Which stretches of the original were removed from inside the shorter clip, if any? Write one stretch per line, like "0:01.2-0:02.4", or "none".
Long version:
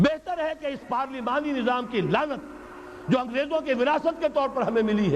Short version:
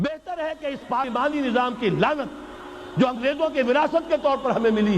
0:01.1-0:01.2